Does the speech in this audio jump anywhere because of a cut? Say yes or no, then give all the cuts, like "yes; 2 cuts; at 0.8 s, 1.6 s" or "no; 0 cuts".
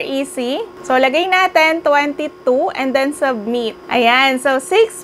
yes; 1 cut; at 3.8 s